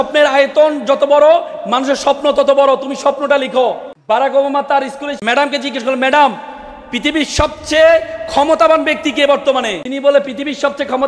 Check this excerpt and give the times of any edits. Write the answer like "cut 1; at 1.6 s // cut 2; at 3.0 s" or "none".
cut 1; at 3.9 s // cut 2; at 5.1 s // cut 3; at 9.8 s